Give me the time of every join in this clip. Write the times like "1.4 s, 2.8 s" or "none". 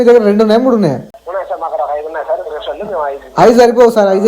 1.1 s